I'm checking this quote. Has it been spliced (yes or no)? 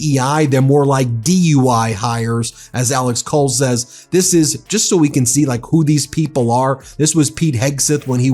yes